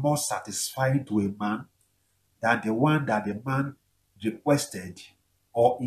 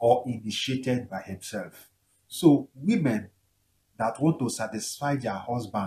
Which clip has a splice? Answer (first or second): first